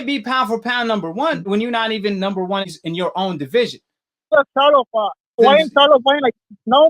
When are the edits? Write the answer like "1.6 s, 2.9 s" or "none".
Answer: 1.4 s, 4.3 s, 5.4 s